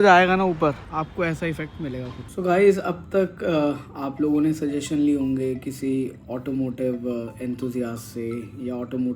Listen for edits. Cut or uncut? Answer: cut